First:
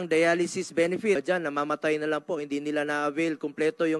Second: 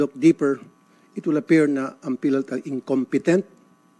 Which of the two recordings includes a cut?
first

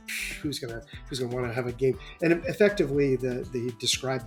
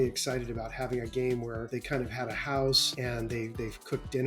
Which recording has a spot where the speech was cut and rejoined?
second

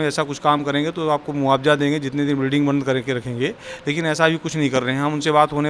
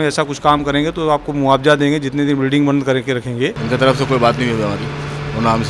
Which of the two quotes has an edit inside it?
second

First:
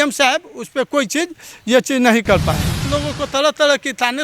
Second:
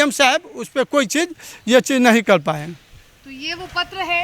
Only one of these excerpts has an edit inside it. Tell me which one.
first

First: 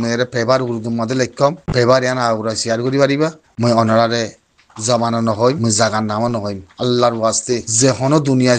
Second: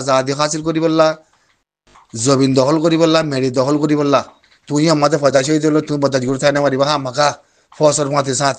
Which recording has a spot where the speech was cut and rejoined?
first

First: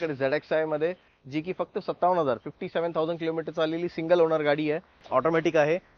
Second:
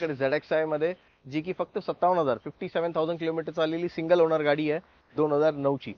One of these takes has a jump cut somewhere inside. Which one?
first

